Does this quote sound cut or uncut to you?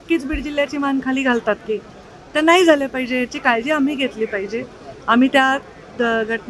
uncut